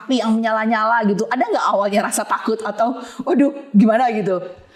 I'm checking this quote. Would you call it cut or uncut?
uncut